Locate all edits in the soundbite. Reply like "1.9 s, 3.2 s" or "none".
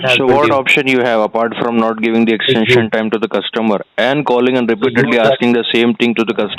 none